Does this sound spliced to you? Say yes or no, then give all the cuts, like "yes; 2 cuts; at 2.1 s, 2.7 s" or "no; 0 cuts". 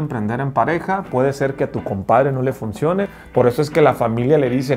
yes; 1 cut; at 3.1 s